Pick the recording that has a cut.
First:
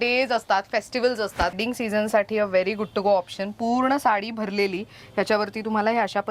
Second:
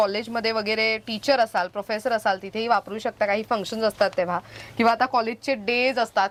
first; 1 cut; at 1.5 s

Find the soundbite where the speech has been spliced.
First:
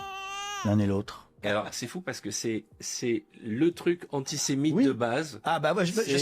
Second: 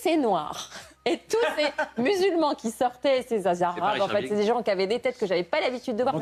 first; 1 cut; at 1.4 s

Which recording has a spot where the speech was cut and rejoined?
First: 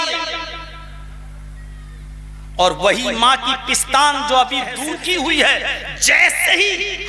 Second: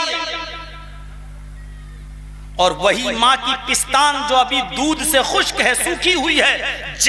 first; 1 cut; at 4.8 s

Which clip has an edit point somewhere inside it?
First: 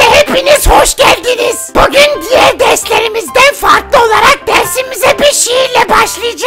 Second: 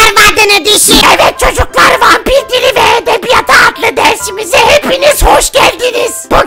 second; 1 cut; at 1.0 s

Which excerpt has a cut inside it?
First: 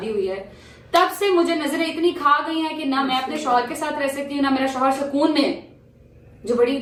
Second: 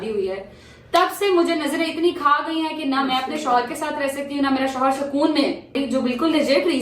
second; 1 cut; at 5.8 s

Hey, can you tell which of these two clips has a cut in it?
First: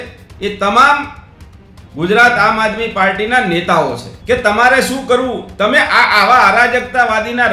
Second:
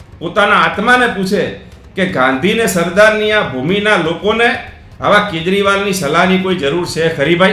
first; 1 cut; at 4.1 s

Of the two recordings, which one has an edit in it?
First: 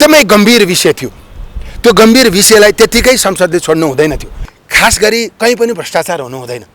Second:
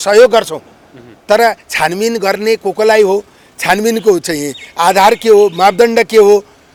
first; 1 cut; at 4.3 s

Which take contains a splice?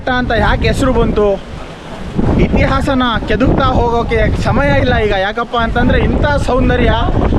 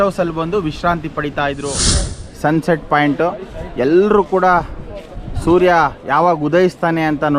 second; 1 cut; at 2.1 s

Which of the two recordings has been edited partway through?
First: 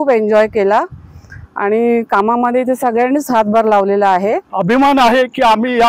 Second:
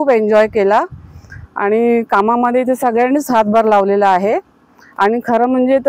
first; 1 cut; at 4.5 s

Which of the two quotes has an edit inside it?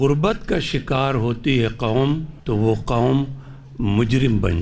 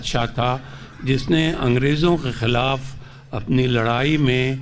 first; 1 cut; at 2.3 s

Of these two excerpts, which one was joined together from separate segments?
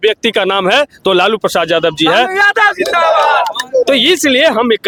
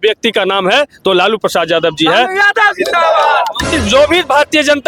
second; 1 cut; at 3.7 s

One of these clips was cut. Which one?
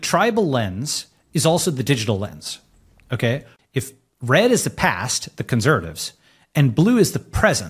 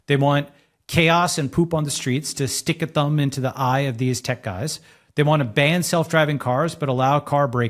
first; 1 cut; at 3.5 s

